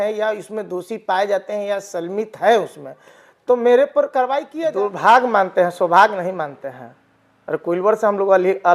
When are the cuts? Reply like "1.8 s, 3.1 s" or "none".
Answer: 4.5 s